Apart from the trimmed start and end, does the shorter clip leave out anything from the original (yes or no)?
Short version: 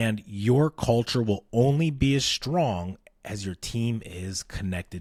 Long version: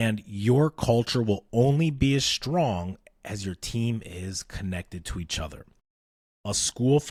no